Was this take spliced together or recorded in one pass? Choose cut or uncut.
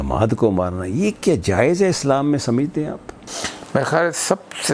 uncut